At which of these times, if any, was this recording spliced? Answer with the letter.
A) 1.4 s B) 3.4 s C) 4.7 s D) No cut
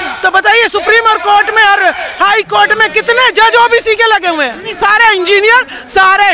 C